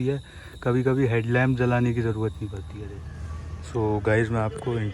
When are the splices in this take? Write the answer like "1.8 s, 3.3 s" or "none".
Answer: 2.7 s

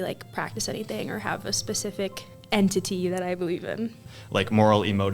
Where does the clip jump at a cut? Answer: 4.1 s

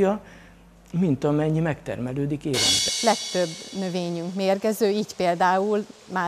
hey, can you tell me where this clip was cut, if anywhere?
2.8 s

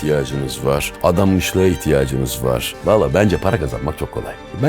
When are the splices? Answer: 0.9 s, 2.7 s

